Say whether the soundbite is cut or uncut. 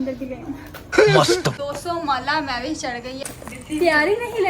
cut